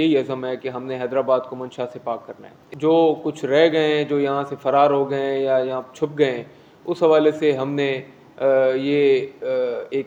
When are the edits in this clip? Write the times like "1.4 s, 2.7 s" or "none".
none